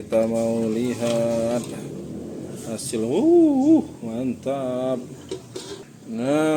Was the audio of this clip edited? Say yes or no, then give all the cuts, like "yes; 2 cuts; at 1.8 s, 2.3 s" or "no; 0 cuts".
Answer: no; 0 cuts